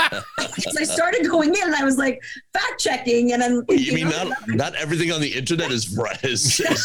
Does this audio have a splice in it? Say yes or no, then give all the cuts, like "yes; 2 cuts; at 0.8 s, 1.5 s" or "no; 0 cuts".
no; 0 cuts